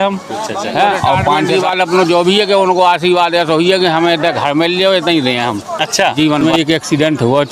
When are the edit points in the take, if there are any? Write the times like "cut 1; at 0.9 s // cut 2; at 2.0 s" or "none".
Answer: cut 1; at 1.5 s // cut 2; at 6.4 s

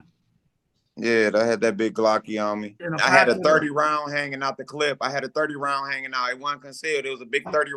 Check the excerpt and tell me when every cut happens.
cut 1; at 2.8 s

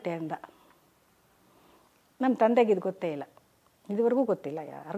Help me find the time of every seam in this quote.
none

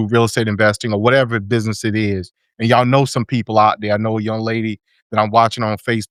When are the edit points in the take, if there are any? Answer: none

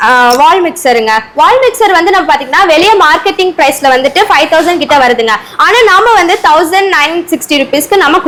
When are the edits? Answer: none

